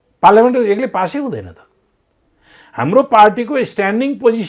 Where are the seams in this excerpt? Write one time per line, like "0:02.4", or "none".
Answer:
none

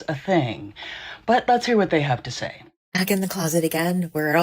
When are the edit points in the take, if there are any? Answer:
0:03.0

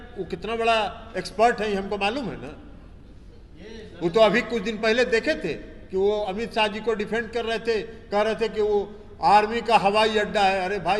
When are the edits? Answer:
none

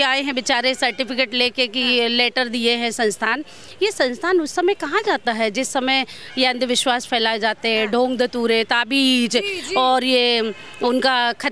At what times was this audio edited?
none

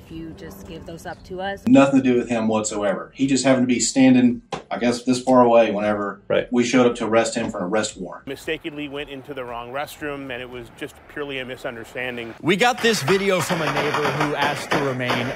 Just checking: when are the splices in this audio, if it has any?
0:01.5
0:08.1
0:12.4

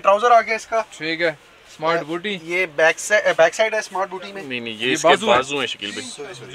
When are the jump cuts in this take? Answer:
none

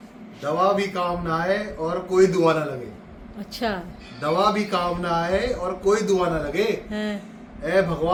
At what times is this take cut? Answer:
none

